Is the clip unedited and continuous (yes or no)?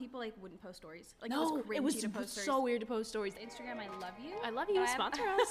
no